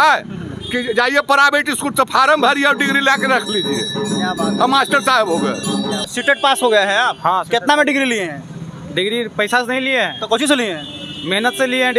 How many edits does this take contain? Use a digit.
1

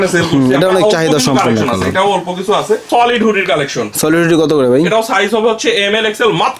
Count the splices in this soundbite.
1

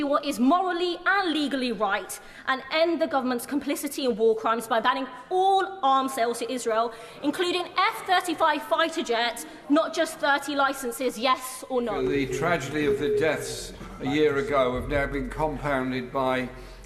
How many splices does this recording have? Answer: 1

